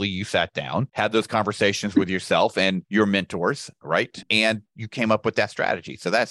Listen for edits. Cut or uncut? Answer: cut